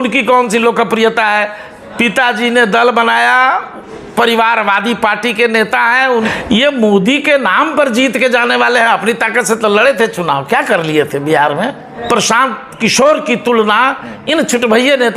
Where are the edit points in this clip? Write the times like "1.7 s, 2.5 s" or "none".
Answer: 6.3 s, 11.9 s